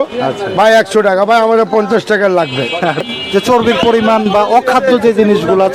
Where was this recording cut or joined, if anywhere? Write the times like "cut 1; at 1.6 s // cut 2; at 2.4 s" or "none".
cut 1; at 3.1 s

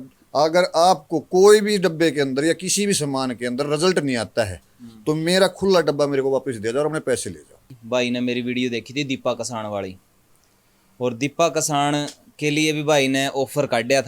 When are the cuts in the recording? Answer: cut 1; at 7.8 s

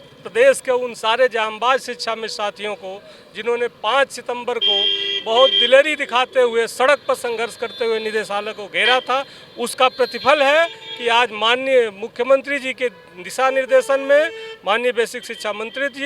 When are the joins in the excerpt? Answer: none

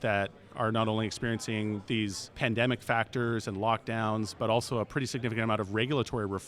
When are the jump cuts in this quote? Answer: cut 1; at 2.1 s // cut 2; at 4.3 s

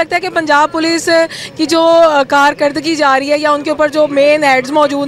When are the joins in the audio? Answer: none

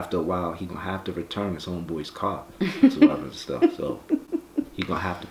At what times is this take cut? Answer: none

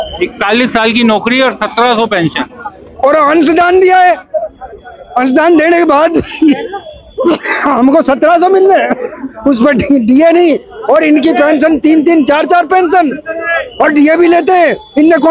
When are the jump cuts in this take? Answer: none

